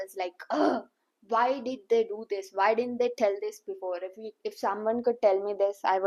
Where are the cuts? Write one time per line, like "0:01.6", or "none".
none